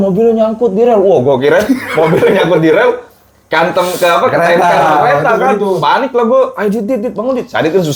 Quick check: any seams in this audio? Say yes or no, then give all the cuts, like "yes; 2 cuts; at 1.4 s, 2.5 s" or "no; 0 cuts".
no; 0 cuts